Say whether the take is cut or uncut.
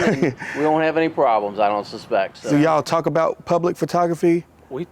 cut